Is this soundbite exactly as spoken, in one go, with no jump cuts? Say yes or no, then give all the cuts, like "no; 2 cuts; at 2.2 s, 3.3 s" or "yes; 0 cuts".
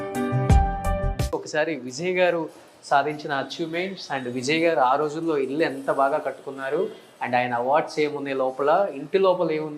no; 1 cut; at 1.1 s